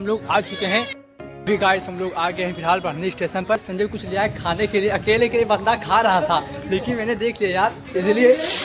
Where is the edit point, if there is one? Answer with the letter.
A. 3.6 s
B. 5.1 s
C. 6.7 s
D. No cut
A